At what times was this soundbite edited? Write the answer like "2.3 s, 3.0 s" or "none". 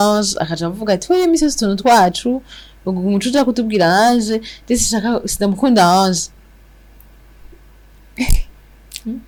none